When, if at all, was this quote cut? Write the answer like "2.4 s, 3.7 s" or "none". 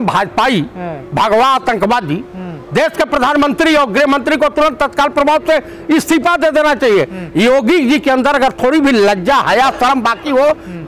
none